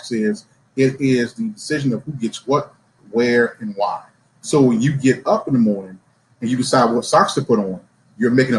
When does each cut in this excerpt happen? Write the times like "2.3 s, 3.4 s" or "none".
none